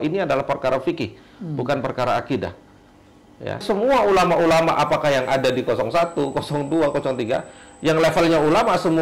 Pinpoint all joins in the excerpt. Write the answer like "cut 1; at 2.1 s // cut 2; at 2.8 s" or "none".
cut 1; at 3.6 s